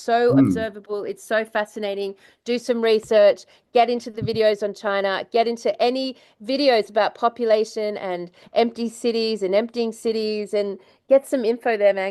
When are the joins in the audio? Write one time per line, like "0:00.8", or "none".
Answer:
none